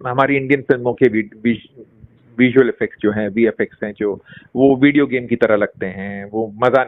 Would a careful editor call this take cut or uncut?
uncut